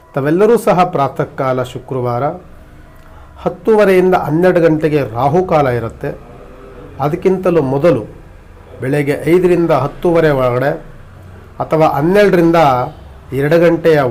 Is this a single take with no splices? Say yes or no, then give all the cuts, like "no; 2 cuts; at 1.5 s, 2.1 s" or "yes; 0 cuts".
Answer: yes; 0 cuts